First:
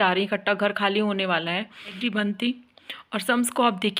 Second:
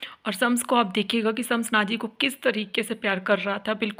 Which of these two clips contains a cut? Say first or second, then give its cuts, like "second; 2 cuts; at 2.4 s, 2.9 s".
first; 1 cut; at 2.0 s